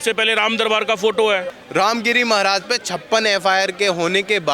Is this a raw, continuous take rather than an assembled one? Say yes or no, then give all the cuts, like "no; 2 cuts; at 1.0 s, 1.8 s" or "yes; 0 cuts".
no; 1 cut; at 1.6 s